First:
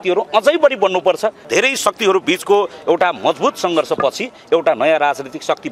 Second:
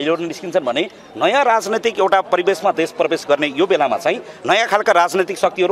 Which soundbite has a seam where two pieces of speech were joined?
first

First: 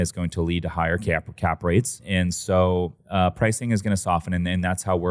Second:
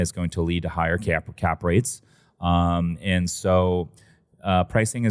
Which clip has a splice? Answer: first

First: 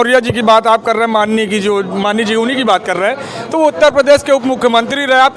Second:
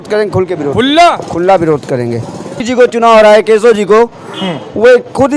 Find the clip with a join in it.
second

